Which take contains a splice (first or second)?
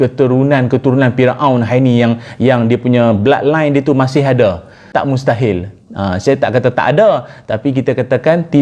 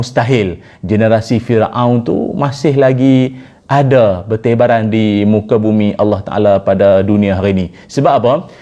first